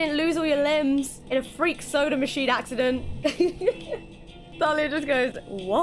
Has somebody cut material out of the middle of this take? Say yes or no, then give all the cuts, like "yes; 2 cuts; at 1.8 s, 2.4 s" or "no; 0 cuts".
yes; 3 cuts; at 1.2 s, 3.1 s, 4.5 s